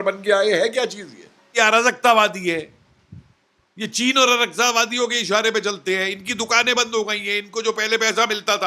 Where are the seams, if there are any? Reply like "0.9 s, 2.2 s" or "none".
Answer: 1.5 s

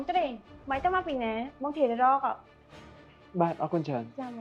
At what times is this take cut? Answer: none

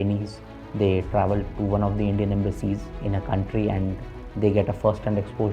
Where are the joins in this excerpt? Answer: 3.0 s

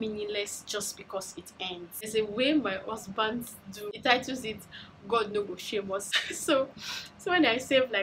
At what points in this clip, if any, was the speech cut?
2.1 s, 3.9 s, 6.1 s

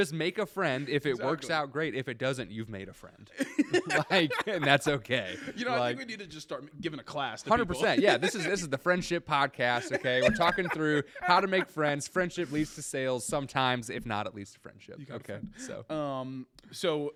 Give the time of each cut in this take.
none

